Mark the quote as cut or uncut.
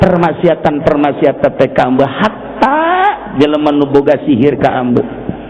uncut